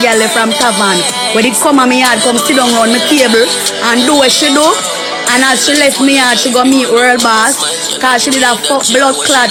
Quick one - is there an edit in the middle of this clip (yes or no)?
no